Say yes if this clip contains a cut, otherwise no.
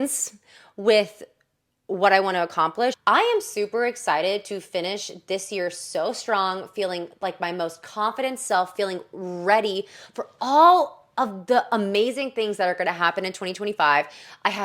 yes